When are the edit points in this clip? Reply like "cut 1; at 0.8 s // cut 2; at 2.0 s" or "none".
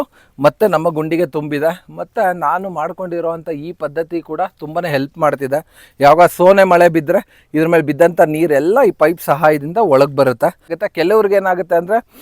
cut 1; at 10.8 s